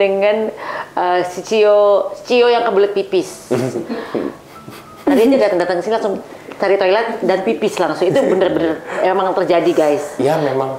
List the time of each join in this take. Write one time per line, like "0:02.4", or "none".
none